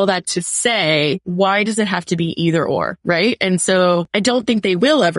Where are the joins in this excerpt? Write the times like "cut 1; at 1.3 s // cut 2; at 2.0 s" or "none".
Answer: cut 1; at 1.2 s // cut 2; at 2.9 s // cut 3; at 4.1 s